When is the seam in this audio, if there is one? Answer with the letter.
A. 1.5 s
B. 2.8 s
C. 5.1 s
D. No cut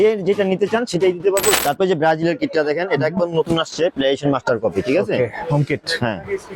A